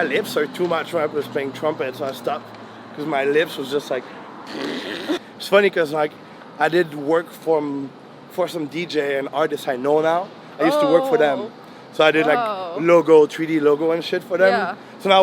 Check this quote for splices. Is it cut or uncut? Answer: cut